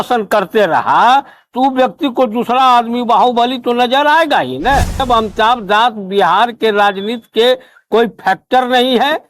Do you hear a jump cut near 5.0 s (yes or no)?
yes